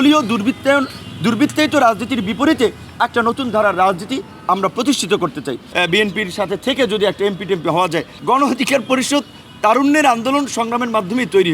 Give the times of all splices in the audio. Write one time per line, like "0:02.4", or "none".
0:05.6
0:08.1